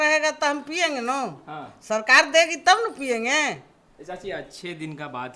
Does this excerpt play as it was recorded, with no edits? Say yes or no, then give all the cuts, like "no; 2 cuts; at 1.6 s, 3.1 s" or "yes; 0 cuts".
yes; 0 cuts